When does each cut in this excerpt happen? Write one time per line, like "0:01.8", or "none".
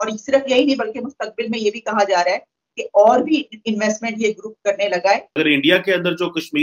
0:05.4